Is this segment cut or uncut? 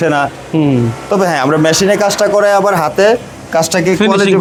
uncut